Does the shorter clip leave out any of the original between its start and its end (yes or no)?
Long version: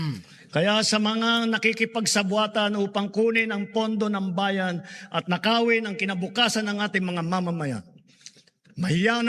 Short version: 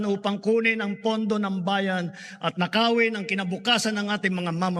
no